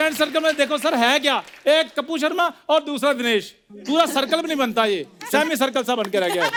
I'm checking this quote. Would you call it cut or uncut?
uncut